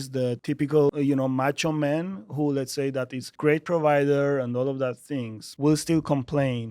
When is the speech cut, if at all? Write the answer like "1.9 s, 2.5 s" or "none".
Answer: 0.8 s, 3.2 s, 5.4 s